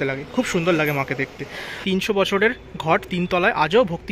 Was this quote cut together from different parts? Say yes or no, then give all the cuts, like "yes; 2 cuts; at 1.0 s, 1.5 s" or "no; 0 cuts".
yes; 1 cut; at 1.7 s